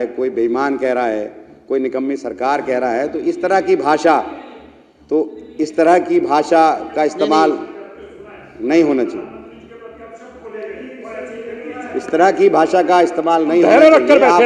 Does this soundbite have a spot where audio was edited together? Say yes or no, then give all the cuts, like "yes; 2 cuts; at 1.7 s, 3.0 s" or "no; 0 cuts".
no; 0 cuts